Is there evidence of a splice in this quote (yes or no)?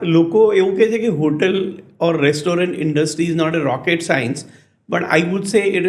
no